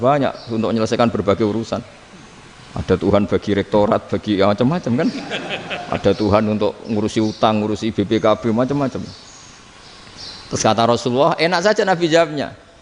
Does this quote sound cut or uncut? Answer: uncut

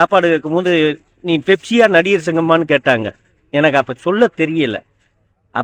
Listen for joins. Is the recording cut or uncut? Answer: uncut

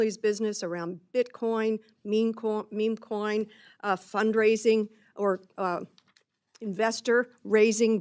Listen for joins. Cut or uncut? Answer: uncut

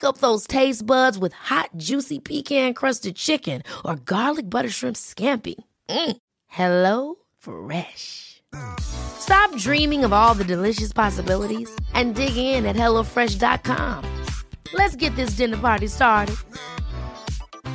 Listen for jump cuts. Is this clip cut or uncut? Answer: uncut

